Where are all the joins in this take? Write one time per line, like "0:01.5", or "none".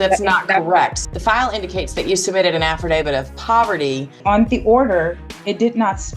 0:01.0
0:04.2